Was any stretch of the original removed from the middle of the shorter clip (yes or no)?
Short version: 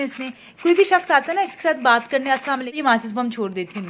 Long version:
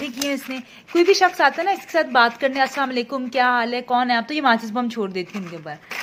yes